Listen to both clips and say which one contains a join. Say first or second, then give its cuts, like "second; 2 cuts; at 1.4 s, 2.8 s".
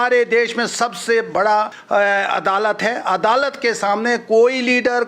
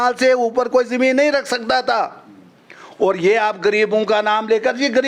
first; 1 cut; at 1.8 s